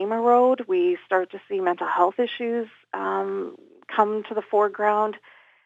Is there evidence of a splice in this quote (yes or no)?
no